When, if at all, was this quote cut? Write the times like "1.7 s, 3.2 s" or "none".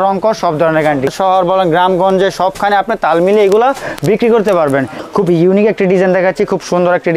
1.1 s, 4.9 s